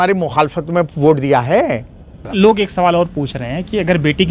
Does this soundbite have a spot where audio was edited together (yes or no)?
yes